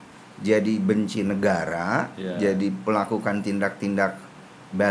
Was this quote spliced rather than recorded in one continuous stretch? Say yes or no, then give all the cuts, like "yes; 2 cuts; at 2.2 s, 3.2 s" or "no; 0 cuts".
no; 0 cuts